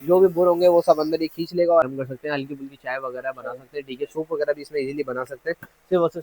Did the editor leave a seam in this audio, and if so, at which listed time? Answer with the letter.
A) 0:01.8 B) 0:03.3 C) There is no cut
A